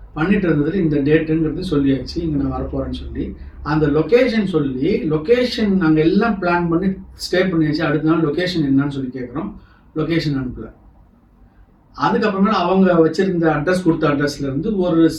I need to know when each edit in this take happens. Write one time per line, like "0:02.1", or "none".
none